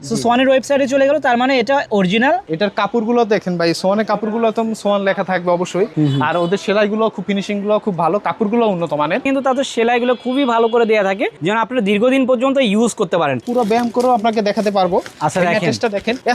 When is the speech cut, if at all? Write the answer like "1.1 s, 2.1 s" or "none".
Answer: 2.5 s, 5.9 s, 9.3 s, 13.4 s